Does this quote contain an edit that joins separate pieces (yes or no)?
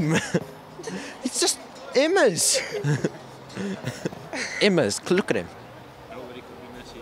yes